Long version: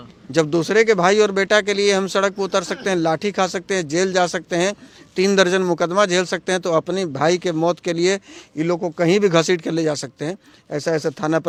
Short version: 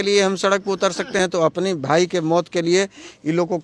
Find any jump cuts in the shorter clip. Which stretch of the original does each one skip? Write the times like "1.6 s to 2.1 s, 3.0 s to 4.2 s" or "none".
2.9 s to 6.5 s

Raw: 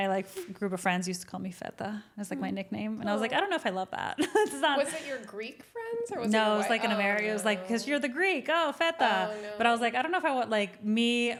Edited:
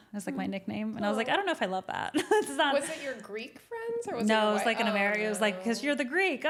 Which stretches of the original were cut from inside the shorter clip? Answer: none

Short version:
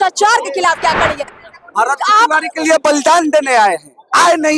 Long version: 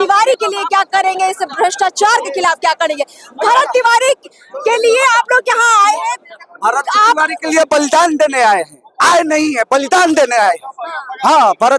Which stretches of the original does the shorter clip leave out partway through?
3.2 s to 6.3 s

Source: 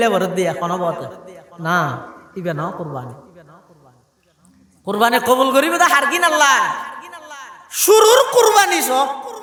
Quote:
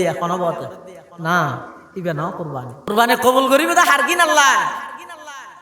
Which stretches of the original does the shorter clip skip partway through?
3.3 s to 4.9 s

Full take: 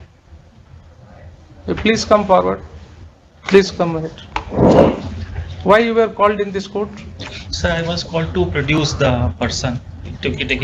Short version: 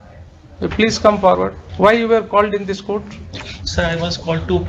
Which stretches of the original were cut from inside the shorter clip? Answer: 2.7 s to 5.5 s

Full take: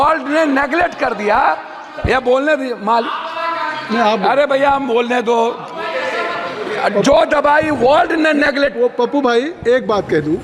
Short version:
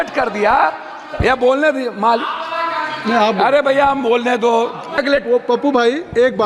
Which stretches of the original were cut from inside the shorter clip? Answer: 5.8 s to 8.5 s

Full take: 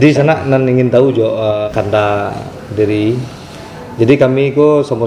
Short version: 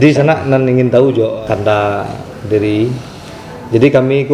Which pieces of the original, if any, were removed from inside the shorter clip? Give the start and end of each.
1.4 s to 1.7 s

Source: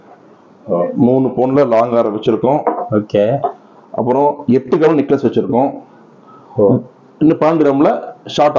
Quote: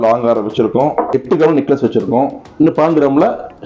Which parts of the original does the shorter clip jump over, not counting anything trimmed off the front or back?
2.8 s to 4.6 s, 5.8 s to 7.1 s

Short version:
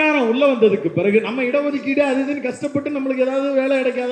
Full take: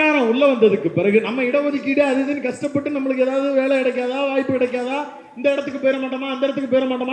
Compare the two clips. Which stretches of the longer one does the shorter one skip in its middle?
none

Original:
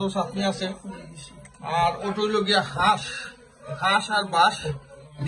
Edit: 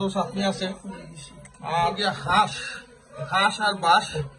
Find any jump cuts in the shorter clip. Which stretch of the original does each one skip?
2.0 s to 2.5 s

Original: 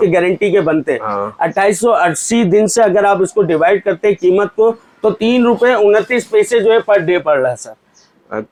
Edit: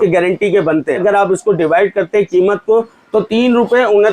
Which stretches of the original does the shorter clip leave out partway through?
1.0 s to 2.9 s

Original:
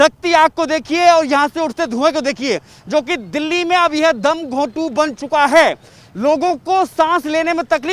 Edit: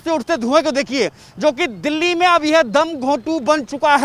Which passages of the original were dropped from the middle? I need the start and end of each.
none

